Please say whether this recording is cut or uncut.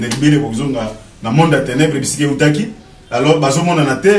uncut